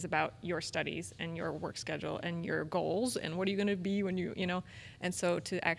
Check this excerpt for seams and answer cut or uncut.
uncut